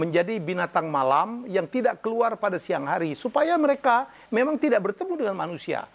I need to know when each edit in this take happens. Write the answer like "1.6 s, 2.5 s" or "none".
none